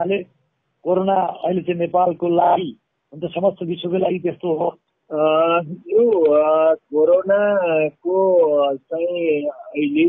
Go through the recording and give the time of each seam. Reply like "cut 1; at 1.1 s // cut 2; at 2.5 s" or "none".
cut 1; at 4.8 s